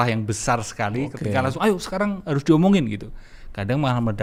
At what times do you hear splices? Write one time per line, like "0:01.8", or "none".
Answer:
none